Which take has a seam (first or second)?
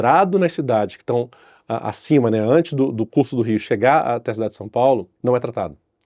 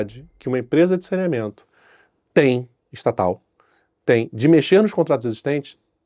first